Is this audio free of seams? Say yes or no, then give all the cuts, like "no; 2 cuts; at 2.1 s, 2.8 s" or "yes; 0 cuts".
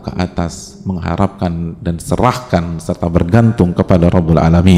yes; 0 cuts